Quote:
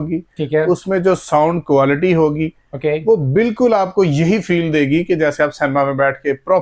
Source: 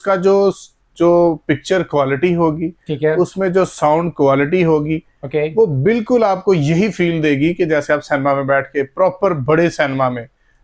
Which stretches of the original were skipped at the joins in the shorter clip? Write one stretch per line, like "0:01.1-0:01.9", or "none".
none